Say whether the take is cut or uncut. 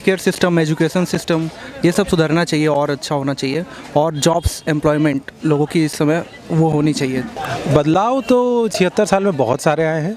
uncut